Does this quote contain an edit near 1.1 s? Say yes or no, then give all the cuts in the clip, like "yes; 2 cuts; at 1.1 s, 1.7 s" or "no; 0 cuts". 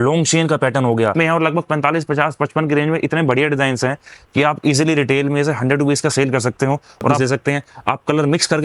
yes; 2 cuts; at 1.1 s, 7.2 s